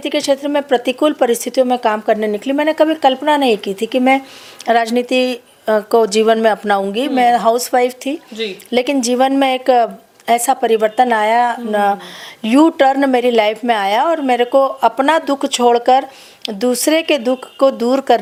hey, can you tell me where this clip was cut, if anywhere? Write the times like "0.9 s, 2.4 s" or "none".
none